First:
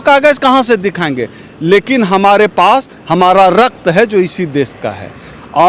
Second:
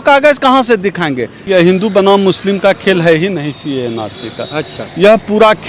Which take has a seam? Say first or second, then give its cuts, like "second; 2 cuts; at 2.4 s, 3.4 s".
second; 1 cut; at 1.4 s